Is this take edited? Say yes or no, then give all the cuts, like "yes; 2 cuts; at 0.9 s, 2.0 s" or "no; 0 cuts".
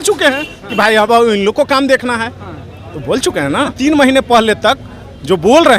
yes; 1 cut; at 3.7 s